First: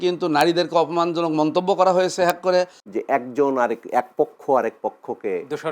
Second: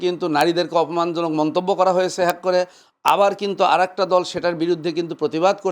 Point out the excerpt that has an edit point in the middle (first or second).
first